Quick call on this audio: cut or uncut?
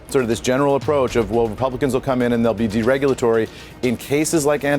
uncut